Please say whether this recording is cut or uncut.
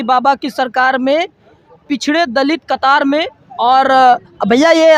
uncut